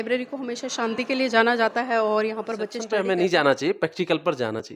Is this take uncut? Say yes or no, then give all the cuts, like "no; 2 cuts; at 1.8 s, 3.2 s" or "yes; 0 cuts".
no; 1 cut; at 2.8 s